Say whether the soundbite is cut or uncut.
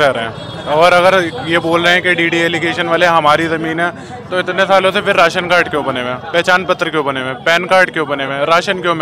uncut